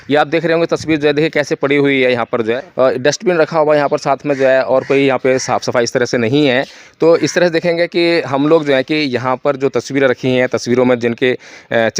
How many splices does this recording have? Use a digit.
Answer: 1